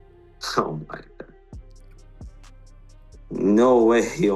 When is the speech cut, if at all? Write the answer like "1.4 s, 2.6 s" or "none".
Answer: 1.5 s, 2.9 s